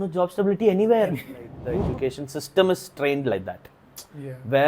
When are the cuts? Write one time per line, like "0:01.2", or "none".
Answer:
0:01.5